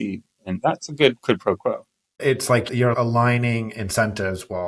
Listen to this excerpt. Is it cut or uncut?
cut